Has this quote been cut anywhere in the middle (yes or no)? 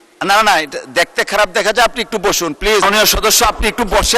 yes